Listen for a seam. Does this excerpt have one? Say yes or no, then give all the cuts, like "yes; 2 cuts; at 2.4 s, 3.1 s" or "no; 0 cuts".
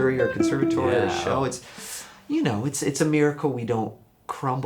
no; 0 cuts